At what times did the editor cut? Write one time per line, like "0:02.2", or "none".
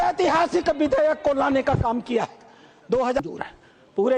0:03.2